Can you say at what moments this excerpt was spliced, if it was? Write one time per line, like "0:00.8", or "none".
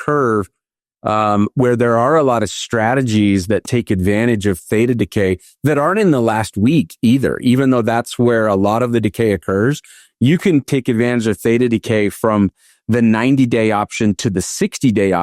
none